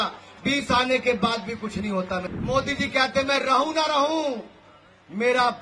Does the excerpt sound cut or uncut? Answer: cut